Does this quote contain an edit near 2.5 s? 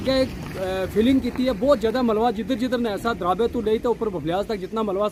no; 0 cuts

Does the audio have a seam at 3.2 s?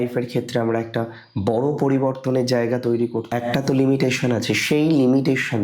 yes; 1 cut; at 3.2 s

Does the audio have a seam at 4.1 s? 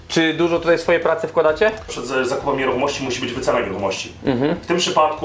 no; 1 cut; at 1.9 s

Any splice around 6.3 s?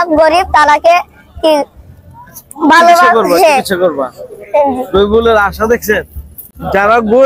no; 0 cuts

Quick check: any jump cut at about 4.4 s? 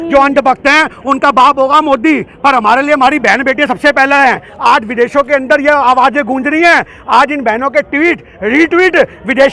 yes; 1 cut; at 4.4 s

